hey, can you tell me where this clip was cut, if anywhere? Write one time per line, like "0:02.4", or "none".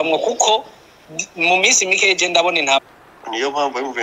0:02.8